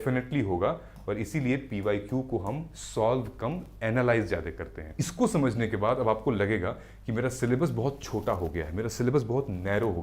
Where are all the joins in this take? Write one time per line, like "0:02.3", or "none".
0:05.1